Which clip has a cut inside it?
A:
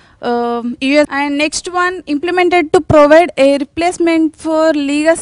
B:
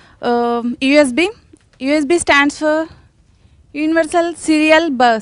B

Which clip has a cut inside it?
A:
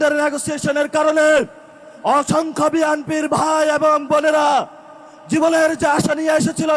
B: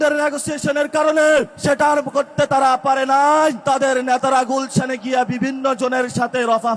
B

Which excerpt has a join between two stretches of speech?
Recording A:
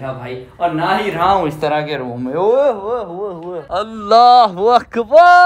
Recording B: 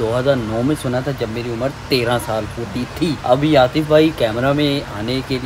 A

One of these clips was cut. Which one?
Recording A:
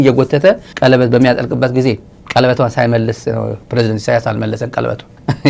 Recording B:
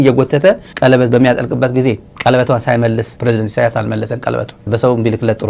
B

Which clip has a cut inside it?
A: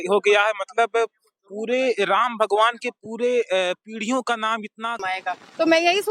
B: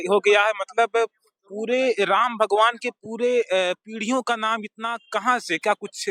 A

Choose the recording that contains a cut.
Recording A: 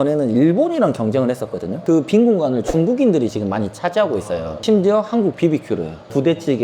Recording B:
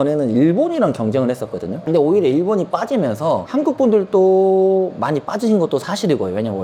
A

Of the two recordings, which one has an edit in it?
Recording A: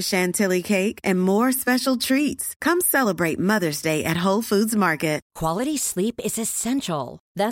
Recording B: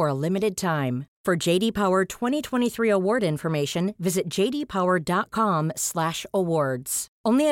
A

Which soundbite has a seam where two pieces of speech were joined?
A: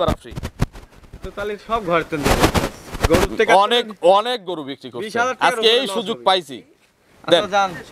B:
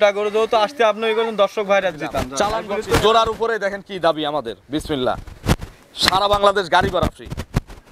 B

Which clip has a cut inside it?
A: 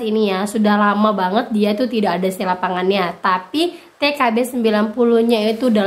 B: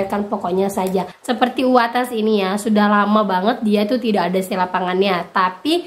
B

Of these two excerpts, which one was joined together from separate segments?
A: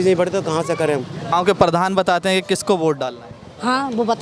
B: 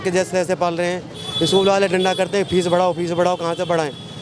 A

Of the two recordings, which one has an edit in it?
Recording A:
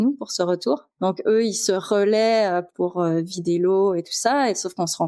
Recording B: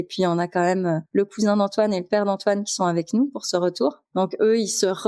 B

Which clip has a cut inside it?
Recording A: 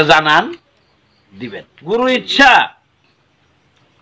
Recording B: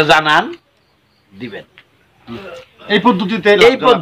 A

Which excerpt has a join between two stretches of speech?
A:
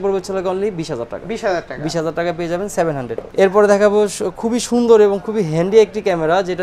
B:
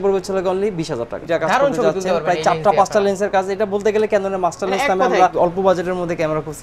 B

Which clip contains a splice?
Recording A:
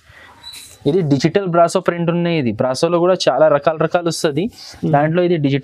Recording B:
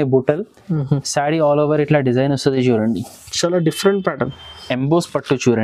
B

